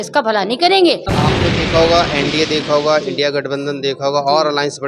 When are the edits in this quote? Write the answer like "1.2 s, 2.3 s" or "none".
1.1 s